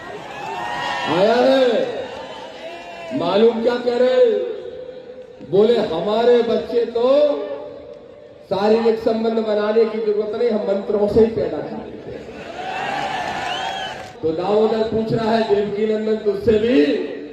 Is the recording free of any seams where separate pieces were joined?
no; 1 cut; at 14.0 s

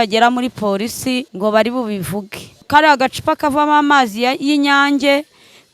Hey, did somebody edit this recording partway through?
yes; 2 cuts; at 1.3 s, 2.6 s

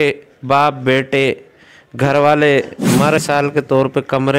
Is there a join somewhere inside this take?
yes; 1 cut; at 3.2 s

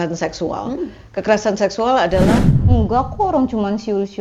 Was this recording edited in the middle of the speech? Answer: yes; 1 cut; at 2.5 s

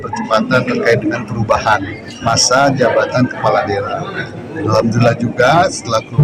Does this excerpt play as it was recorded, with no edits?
no; 1 cut; at 2.2 s

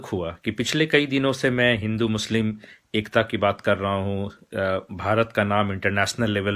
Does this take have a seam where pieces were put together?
no; 0 cuts

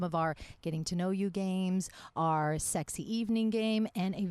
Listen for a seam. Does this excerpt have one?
no; 0 cuts

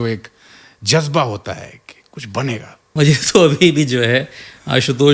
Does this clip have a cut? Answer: yes; 1 cut; at 2.9 s

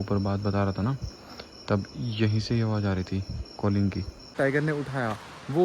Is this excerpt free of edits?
no; 1 cut; at 4.3 s

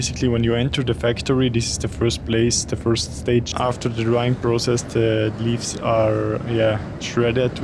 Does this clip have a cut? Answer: yes; 1 cut; at 3.5 s

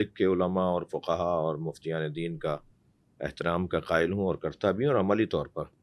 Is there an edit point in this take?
no; 0 cuts

